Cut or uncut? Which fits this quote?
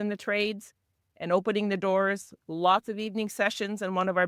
uncut